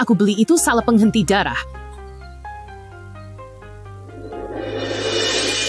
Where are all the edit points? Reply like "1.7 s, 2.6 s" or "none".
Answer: 2.2 s, 4.1 s

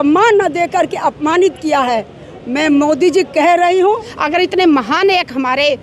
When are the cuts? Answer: 4.0 s

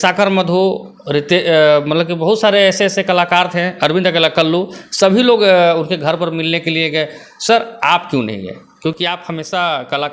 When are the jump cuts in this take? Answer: none

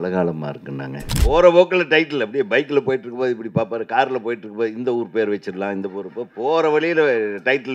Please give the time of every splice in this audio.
1.1 s

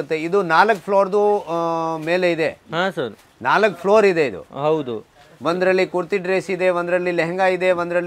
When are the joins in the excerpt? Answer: none

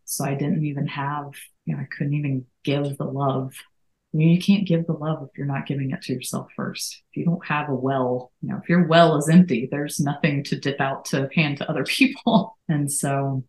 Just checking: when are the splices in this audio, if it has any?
1.4 s, 8.3 s, 12.6 s

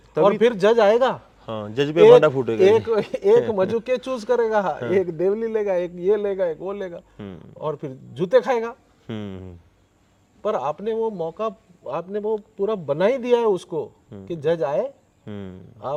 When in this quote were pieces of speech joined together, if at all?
none

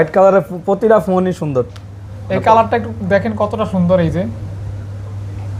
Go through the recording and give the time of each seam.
none

